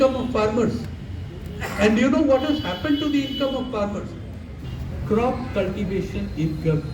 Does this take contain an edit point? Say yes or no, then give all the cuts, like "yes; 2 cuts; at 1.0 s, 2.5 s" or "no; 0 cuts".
yes; 1 cut; at 4.5 s